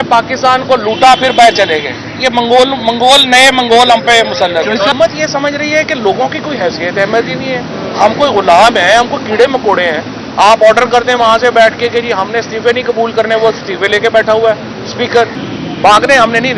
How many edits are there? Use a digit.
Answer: 2